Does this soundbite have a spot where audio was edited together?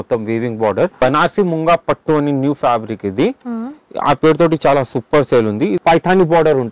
yes; 2 cuts; at 1.0 s, 5.8 s

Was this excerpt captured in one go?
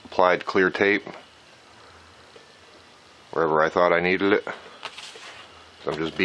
yes; 0 cuts

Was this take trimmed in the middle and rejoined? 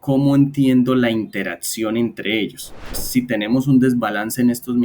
yes; 1 cut; at 2.9 s

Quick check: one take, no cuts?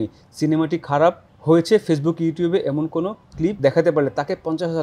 no; 2 cuts; at 1.3 s, 3.6 s

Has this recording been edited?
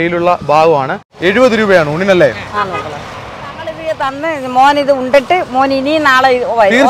yes; 2 cuts; at 1.0 s, 3.8 s

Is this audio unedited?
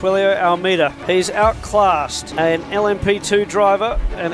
no; 2 cuts; at 1.0 s, 2.2 s

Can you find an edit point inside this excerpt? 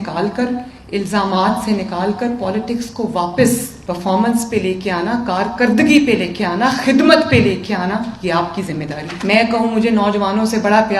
yes; 2 cuts; at 3.7 s, 9.1 s

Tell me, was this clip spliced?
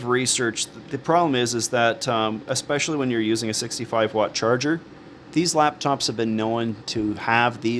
no; 0 cuts

